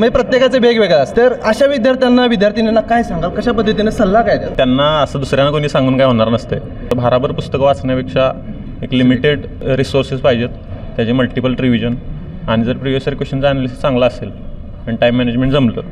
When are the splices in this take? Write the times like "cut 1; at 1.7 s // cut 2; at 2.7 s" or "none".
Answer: cut 1; at 1.1 s // cut 2; at 4.5 s // cut 3; at 6.8 s // cut 4; at 9.5 s